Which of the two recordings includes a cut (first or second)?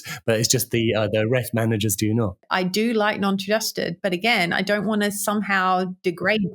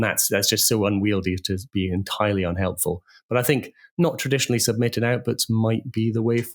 first